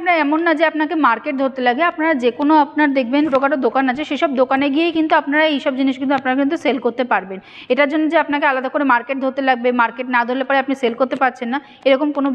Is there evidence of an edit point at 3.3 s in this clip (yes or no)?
no